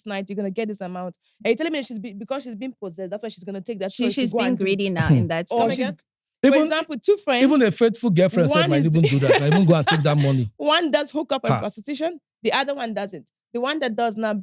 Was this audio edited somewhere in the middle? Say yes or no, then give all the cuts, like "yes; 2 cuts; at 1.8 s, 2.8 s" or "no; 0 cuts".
no; 0 cuts